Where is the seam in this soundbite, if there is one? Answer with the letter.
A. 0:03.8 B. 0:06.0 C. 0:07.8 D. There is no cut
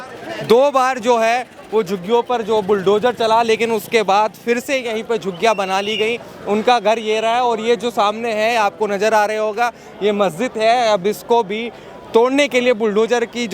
D